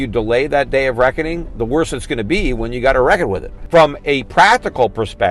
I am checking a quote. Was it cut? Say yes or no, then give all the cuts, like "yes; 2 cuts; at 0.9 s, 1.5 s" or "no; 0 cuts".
yes; 1 cut; at 3.5 s